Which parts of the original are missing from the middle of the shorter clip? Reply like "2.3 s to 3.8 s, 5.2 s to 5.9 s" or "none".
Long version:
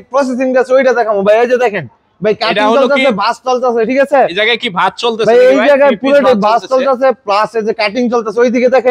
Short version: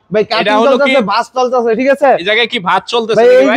none